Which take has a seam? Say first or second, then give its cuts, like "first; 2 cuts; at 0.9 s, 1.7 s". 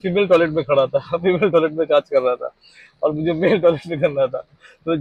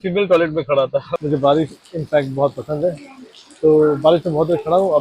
second; 1 cut; at 1.1 s